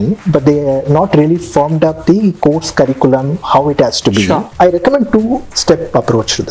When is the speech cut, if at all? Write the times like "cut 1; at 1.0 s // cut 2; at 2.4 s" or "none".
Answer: cut 1; at 4.5 s